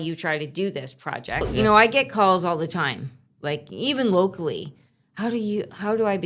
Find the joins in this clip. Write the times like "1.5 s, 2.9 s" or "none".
1.5 s

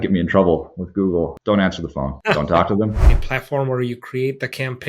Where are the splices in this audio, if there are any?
2.9 s

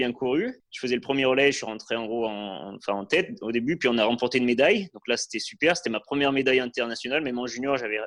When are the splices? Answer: none

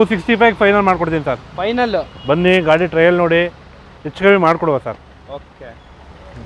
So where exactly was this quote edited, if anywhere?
none

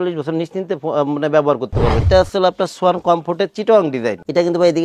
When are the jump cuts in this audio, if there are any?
2.0 s

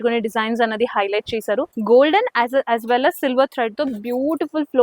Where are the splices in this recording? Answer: 1.7 s

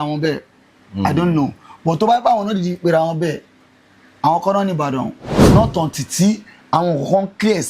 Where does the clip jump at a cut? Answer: 5.3 s

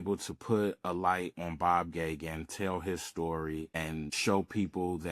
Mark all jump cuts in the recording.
4.0 s

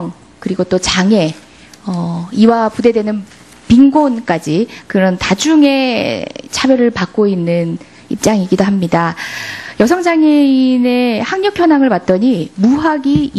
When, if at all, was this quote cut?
none

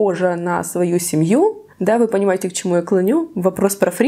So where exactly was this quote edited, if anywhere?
1.7 s

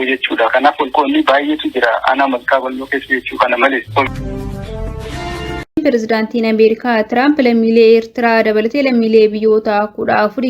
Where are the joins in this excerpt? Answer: 4.1 s, 5.8 s

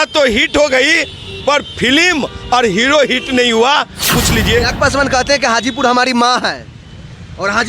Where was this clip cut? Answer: 4.1 s

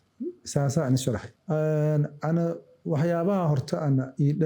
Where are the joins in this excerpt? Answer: 1.3 s

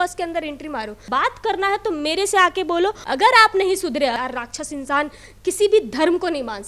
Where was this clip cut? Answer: 1.1 s, 3.0 s, 4.1 s

